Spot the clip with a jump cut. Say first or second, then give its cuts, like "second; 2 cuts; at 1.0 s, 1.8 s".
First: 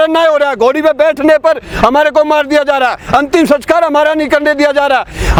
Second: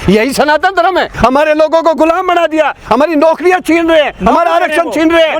second; 1 cut; at 1.1 s